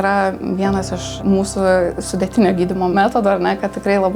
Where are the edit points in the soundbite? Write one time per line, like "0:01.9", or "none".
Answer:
0:01.1
0:02.9